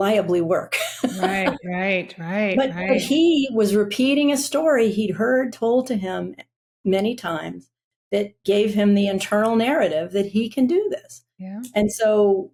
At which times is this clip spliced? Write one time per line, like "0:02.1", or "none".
none